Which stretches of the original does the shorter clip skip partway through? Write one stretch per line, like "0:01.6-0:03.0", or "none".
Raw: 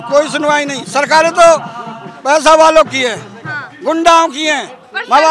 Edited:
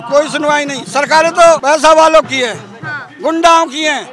0:01.6-0:02.2